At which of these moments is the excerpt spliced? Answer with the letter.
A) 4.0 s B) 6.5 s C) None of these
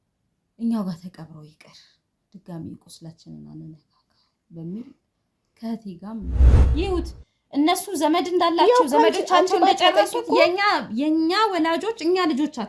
B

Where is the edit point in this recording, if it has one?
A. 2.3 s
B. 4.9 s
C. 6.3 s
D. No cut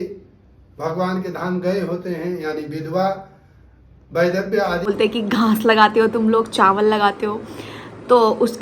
B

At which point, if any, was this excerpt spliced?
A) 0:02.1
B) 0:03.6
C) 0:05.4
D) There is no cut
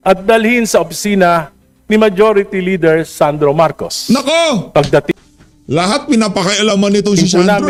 D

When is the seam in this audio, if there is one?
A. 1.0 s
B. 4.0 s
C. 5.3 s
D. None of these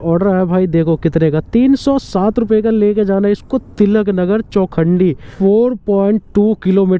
C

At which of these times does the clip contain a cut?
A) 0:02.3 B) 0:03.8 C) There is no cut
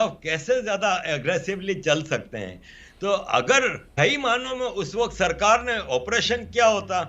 B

